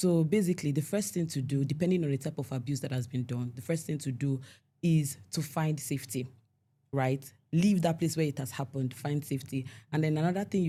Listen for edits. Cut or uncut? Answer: uncut